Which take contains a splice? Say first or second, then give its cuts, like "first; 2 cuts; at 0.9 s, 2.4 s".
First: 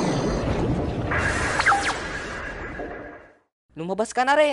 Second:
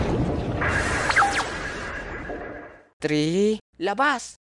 second; 1 cut; at 2.9 s